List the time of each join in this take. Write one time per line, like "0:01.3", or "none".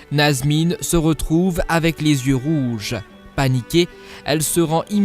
0:01.3